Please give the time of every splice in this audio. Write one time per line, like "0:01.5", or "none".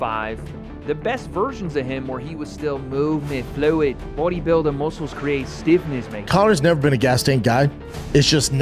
0:06.2